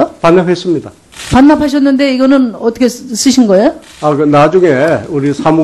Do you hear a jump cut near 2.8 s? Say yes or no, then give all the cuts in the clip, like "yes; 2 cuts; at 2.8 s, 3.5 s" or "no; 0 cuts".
yes; 1 cut; at 2.8 s